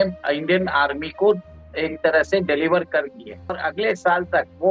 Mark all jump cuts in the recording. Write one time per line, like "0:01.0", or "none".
0:03.6